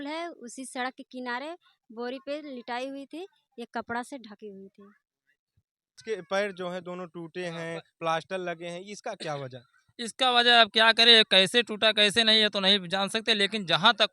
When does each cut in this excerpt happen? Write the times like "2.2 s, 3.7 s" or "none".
6.0 s